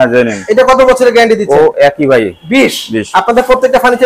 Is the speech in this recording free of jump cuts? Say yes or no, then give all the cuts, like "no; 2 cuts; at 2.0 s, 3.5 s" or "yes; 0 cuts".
yes; 0 cuts